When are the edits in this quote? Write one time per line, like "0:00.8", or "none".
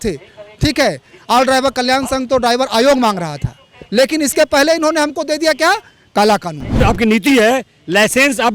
0:06.8